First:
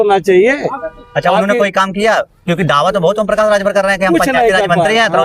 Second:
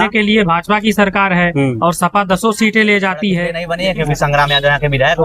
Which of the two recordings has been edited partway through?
second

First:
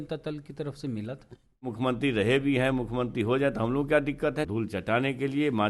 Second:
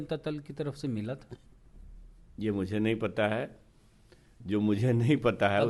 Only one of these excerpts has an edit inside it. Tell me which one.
first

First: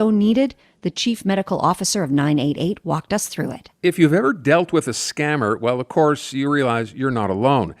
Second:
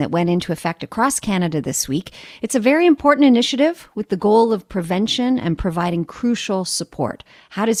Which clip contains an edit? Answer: first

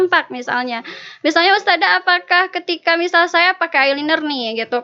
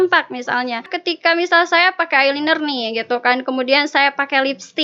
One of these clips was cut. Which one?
second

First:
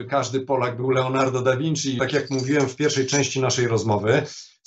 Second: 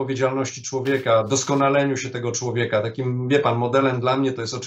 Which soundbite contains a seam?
first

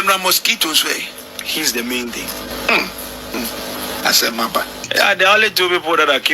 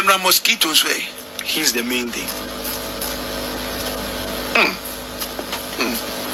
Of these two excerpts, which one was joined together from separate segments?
first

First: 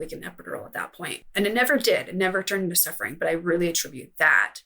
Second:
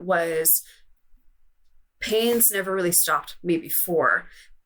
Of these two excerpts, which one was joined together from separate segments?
first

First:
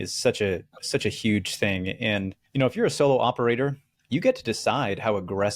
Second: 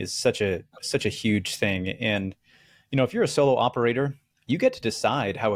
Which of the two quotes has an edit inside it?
first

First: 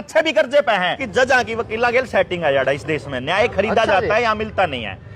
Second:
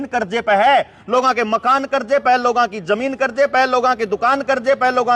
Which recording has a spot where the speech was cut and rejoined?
first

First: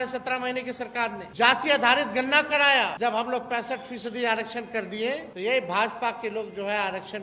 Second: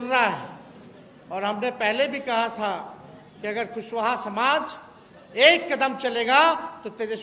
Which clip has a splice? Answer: first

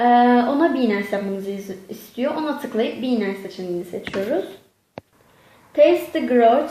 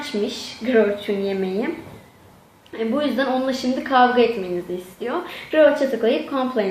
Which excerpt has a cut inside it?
second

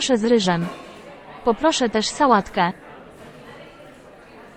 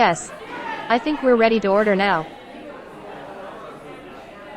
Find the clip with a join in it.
second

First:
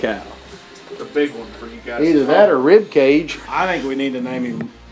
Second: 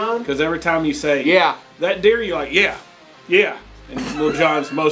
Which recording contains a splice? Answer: first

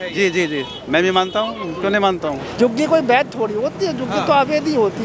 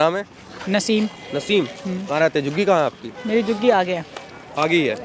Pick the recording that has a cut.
first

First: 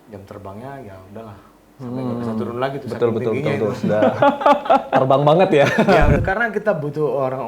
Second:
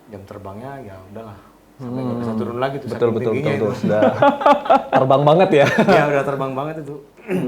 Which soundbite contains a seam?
first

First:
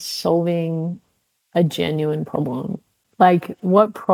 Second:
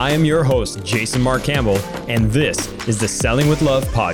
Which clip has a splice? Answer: first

